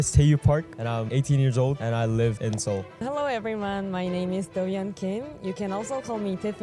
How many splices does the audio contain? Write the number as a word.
three